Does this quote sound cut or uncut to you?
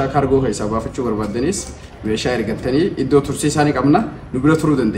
uncut